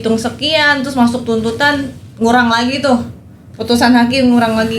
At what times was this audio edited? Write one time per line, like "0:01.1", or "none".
none

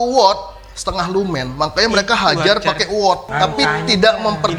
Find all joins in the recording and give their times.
0:03.3

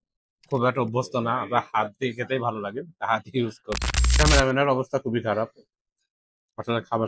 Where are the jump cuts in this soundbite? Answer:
0:04.0

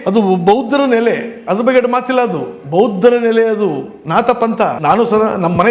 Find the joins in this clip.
0:04.8

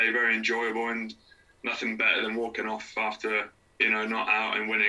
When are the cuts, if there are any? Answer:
0:03.6

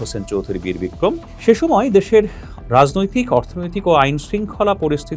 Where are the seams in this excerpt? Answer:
0:01.3

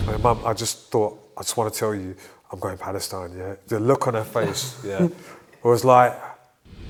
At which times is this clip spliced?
none

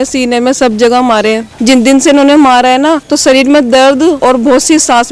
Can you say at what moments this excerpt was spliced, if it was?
0:01.5
0:03.1
0:04.2

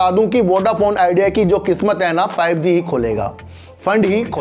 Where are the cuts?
none

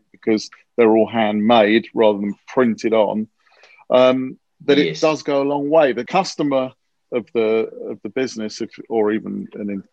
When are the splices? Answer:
0:06.1

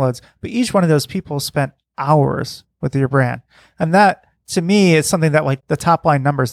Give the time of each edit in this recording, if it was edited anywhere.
0:05.6

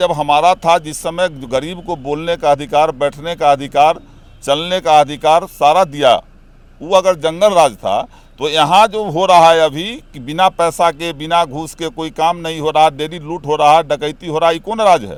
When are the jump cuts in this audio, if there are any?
none

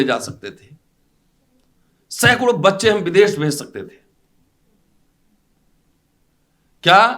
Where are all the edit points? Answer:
none

